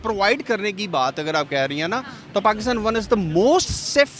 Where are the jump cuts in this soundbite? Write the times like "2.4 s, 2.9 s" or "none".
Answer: none